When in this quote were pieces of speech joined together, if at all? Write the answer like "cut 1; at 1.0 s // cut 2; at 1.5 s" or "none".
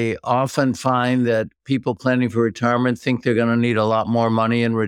none